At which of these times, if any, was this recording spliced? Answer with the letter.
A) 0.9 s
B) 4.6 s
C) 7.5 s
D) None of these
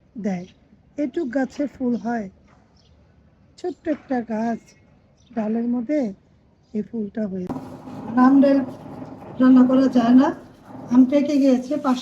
C